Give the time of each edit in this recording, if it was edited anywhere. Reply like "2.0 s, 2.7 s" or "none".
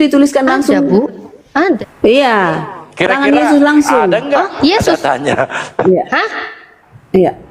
1.8 s